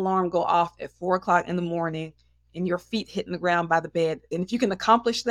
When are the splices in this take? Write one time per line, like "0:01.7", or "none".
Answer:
0:04.2